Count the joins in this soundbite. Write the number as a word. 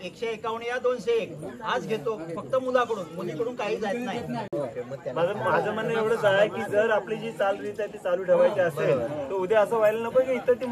zero